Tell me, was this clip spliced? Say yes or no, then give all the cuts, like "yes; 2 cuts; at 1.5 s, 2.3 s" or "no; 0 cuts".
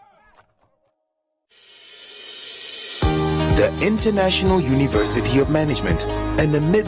yes; 1 cut; at 1.5 s